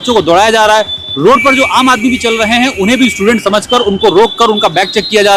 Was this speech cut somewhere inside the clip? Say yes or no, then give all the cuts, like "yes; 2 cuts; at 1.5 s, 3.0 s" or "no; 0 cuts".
no; 0 cuts